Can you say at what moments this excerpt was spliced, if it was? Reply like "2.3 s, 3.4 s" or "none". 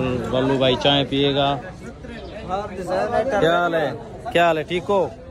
none